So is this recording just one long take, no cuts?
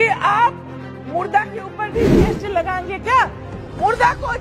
yes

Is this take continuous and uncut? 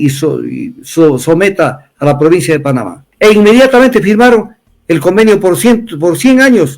no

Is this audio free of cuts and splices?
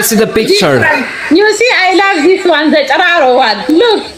yes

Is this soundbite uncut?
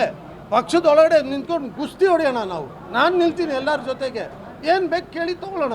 yes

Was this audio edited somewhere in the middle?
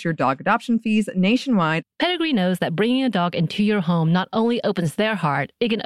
yes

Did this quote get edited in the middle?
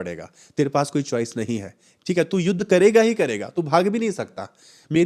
no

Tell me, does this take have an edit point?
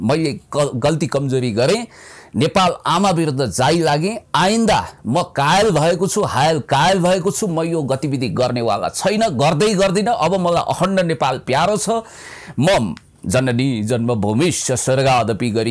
no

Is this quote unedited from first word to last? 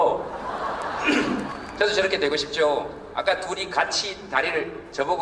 yes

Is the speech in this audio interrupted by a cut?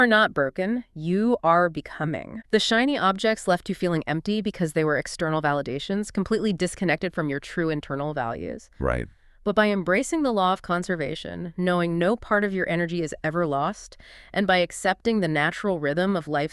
yes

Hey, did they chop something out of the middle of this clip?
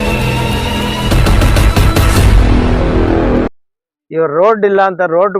yes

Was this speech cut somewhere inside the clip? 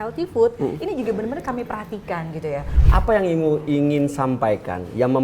yes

